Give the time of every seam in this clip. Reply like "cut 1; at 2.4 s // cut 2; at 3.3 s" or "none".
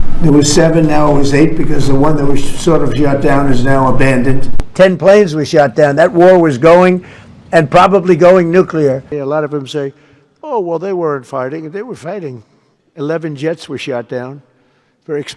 cut 1; at 4.6 s // cut 2; at 9.1 s